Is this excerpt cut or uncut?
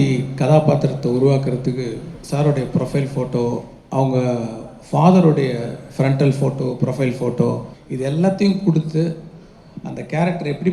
cut